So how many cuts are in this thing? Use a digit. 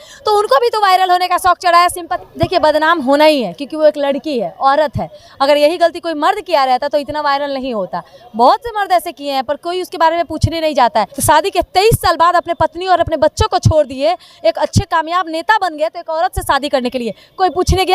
2